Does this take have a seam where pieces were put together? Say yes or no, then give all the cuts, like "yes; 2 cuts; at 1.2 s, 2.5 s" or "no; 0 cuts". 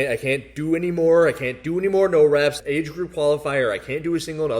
no; 0 cuts